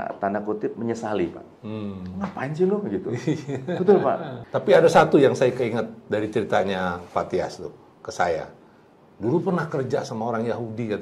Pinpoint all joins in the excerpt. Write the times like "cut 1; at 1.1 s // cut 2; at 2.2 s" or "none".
cut 1; at 4.3 s